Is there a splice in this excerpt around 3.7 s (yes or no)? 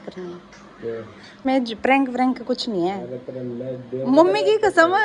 no